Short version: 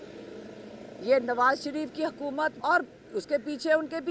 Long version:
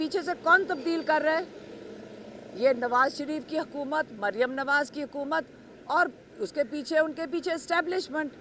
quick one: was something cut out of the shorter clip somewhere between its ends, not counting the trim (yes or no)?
yes